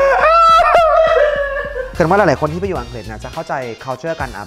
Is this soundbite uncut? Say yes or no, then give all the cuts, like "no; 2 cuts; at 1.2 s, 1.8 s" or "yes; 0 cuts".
no; 1 cut; at 1.8 s